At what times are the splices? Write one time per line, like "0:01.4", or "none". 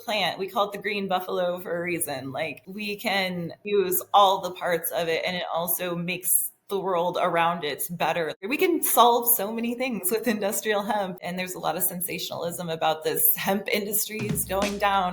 0:03.2
0:08.4
0:11.2